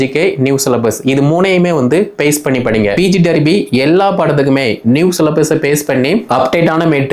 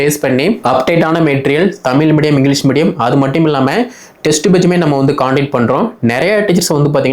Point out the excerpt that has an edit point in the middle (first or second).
first